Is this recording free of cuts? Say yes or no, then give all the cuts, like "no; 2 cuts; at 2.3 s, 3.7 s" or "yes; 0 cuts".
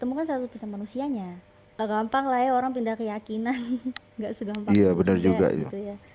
no; 1 cut; at 1.7 s